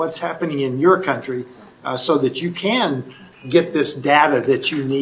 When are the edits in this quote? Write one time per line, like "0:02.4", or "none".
none